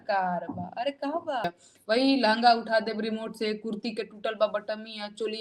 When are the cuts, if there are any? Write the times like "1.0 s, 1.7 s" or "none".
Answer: 1.4 s